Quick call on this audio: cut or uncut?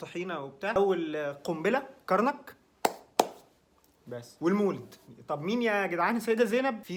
uncut